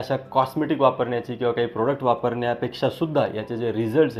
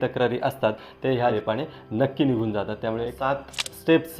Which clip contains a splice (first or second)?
second